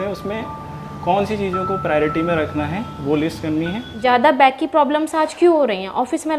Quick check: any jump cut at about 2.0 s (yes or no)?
no